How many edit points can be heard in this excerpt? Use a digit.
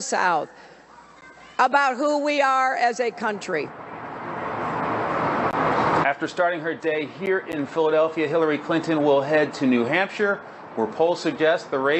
1